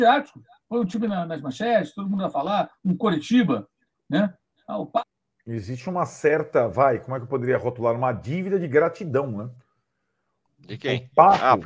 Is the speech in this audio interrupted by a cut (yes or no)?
yes